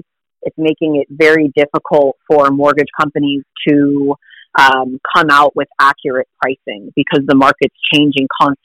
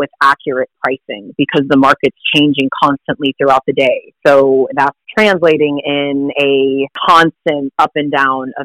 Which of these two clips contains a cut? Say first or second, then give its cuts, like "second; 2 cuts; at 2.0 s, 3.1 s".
second; 4 cuts; at 4.1 s, 5.0 s, 6.9 s, 7.7 s